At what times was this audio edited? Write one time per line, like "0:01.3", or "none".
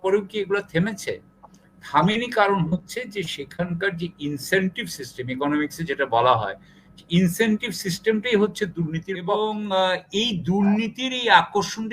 0:09.2